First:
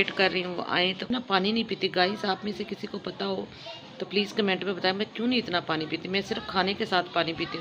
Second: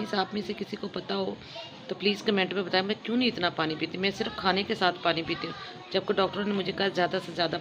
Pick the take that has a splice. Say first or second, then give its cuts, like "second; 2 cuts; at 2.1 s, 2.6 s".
first; 1 cut; at 1.1 s